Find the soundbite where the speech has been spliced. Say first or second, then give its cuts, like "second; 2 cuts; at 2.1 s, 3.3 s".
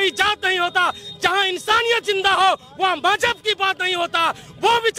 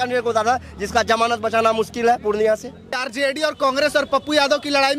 second; 1 cut; at 3.1 s